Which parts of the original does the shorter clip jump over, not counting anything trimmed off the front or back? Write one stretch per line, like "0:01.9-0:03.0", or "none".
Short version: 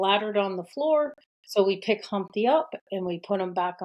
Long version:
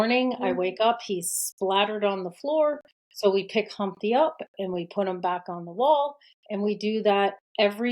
none